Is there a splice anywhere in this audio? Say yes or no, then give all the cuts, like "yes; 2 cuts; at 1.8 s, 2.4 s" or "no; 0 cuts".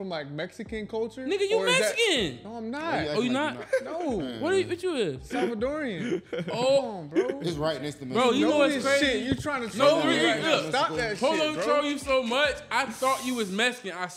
no; 0 cuts